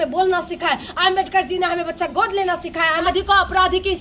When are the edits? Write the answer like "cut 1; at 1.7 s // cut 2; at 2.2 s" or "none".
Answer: cut 1; at 3.1 s